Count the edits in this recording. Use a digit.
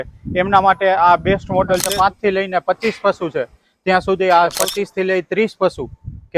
2